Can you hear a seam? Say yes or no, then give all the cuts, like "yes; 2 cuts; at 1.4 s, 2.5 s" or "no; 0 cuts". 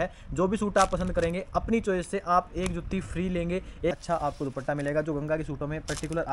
yes; 1 cut; at 3.9 s